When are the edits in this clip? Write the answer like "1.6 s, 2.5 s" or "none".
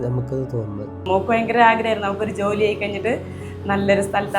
1.0 s